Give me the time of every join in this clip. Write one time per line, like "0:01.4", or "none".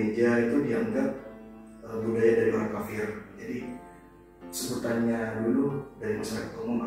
none